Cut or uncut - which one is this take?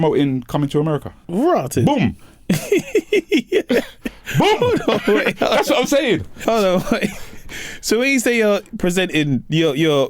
cut